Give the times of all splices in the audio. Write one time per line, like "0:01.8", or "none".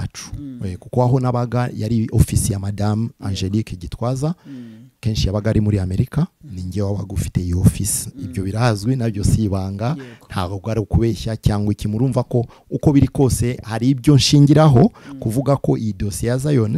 none